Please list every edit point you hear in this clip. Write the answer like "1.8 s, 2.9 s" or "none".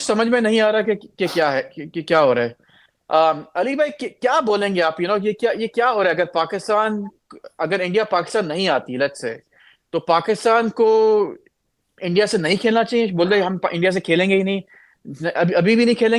none